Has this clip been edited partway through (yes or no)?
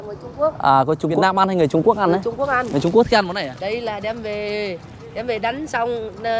yes